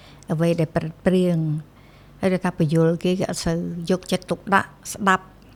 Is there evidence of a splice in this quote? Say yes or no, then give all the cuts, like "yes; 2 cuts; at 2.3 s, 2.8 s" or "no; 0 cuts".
no; 0 cuts